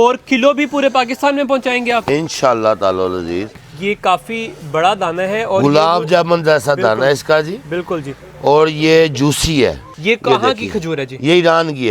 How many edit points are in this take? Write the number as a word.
two